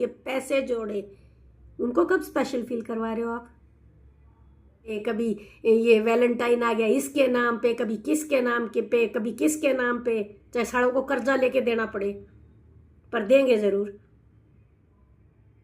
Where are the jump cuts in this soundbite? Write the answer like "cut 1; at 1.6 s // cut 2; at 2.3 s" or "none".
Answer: cut 1; at 5.0 s